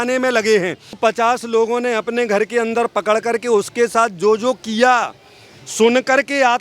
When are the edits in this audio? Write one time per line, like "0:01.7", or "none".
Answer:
0:01.0

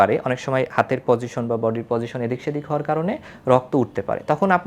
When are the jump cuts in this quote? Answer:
none

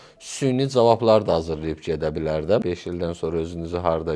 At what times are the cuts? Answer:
0:02.6

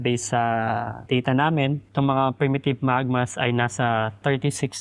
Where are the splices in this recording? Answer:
0:00.9
0:01.8

